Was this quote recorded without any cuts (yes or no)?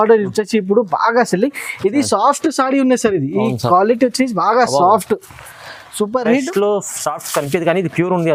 yes